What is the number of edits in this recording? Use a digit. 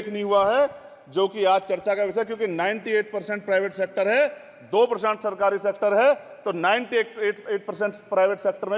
0